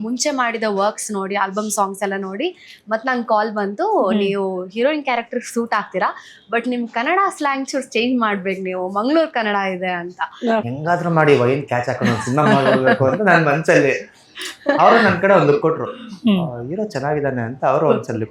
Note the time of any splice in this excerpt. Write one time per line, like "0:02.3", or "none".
0:10.7